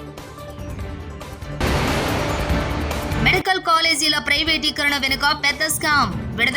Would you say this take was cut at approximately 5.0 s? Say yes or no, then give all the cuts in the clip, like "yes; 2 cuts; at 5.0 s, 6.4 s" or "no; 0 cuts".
no; 2 cuts; at 1.1 s, 3.1 s